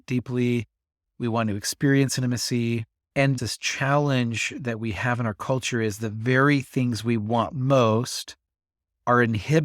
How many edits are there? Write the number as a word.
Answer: one